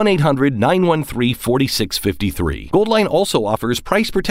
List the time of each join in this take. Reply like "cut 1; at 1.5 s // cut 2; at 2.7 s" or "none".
none